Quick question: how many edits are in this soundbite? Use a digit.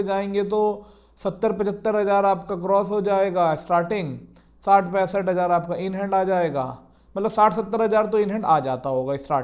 0